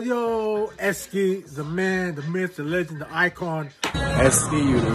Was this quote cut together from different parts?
yes; 1 cut; at 4.0 s

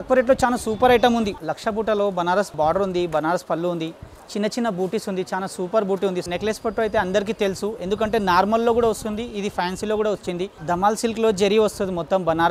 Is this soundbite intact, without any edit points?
no; 4 cuts; at 1.4 s, 2.5 s, 6.2 s, 10.5 s

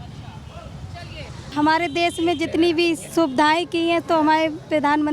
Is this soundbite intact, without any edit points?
no; 1 cut; at 1.4 s

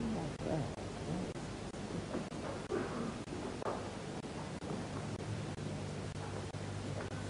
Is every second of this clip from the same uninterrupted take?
yes; 0 cuts

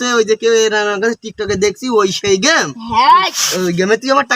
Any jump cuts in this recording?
no; 0 cuts

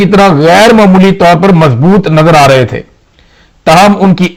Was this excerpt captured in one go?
yes; 0 cuts

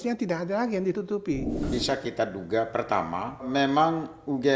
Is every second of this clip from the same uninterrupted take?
no; 2 cuts; at 1.7 s, 3.5 s

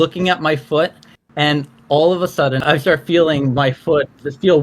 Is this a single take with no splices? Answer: no; 1 cut; at 2.6 s

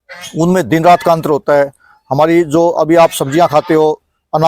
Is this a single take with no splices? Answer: yes; 0 cuts

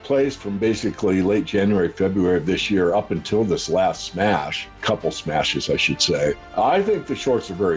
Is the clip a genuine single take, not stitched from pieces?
no; 2 cuts; at 4.8 s, 6.4 s

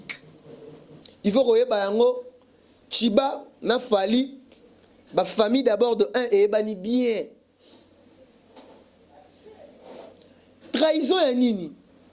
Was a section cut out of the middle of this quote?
yes; 1 cut; at 1.0 s

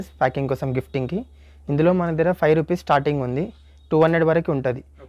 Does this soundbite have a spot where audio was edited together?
no; 0 cuts

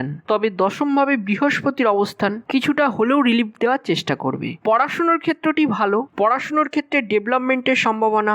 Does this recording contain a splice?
yes; 2 cuts; at 4.5 s, 6.1 s

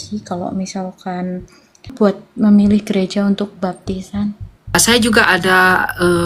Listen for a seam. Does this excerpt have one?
yes; 2 cuts; at 1.9 s, 4.7 s

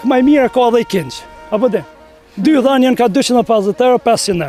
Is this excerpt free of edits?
yes; 0 cuts

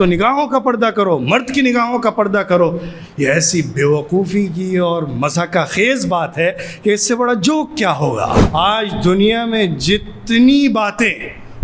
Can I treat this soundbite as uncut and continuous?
no; 1 cut; at 8.4 s

